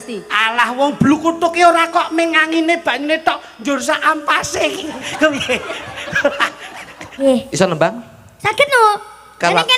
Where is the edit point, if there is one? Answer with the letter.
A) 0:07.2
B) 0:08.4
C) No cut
A